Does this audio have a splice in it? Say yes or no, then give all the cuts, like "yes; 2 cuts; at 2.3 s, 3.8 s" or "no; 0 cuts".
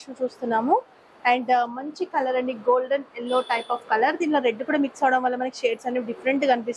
no; 0 cuts